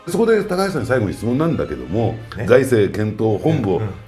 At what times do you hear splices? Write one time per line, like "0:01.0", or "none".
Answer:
0:02.3